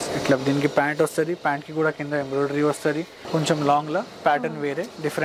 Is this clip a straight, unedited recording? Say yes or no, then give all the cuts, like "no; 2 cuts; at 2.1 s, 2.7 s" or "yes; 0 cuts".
no; 1 cut; at 3.1 s